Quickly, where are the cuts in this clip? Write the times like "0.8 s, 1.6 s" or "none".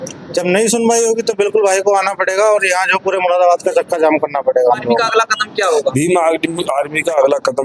5.0 s